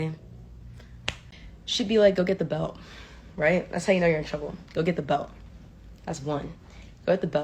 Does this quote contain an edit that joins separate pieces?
yes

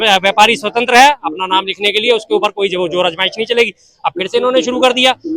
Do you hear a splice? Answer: no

